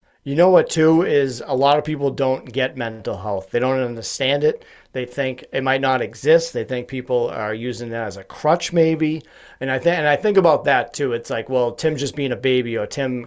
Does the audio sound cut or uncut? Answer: uncut